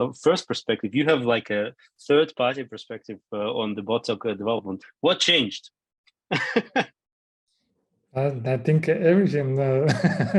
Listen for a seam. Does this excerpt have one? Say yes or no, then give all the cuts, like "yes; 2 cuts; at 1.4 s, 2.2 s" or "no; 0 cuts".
no; 0 cuts